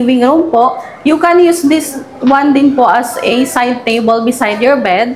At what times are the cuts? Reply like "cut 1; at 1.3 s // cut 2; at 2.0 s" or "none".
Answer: none